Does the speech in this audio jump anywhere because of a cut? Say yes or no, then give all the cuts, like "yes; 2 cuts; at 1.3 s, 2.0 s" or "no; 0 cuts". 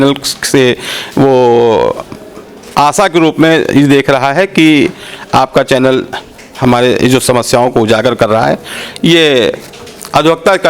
no; 0 cuts